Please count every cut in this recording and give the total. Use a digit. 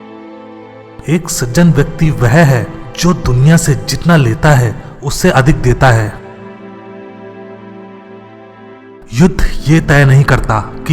1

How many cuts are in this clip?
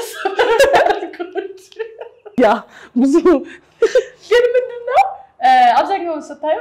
1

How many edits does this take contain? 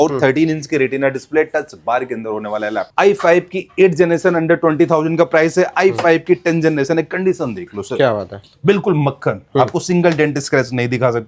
1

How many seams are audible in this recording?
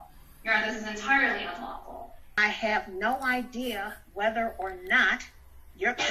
1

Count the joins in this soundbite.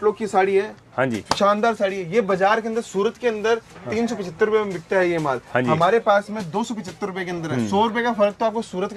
0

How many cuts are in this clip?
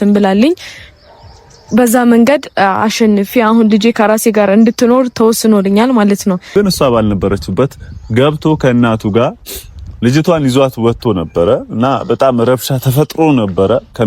1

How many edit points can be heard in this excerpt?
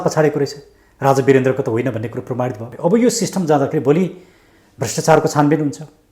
1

